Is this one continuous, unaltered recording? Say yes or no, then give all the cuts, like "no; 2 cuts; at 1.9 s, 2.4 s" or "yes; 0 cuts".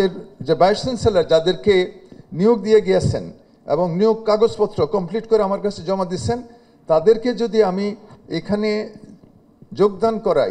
yes; 0 cuts